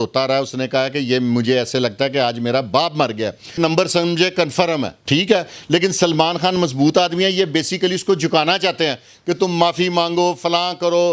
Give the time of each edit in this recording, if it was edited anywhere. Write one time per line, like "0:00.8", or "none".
0:03.5
0:05.0